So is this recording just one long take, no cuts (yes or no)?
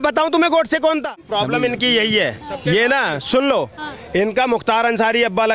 no